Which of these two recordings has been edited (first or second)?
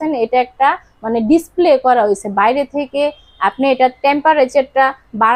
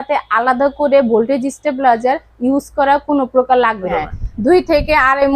second